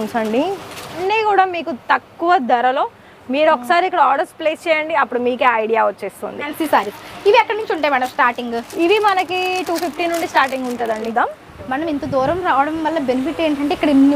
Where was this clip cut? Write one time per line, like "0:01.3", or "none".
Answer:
0:01.0
0:06.5
0:11.1